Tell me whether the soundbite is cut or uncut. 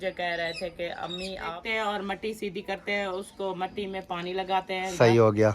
cut